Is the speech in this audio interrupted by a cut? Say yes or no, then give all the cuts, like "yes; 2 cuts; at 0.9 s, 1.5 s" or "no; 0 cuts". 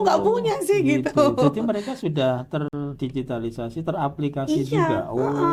no; 0 cuts